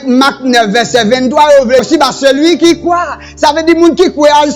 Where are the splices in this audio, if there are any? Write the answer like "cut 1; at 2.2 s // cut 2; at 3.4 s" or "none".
cut 1; at 1.8 s